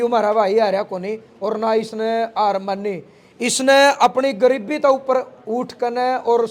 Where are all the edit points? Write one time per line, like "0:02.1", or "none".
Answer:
none